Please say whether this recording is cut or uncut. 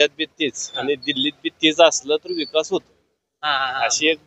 uncut